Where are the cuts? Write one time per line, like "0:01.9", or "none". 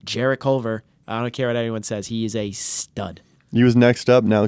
0:01.0